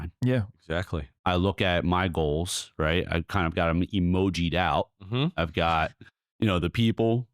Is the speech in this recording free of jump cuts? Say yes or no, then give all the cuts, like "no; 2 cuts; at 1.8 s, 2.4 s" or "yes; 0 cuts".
no; 1 cut; at 1.1 s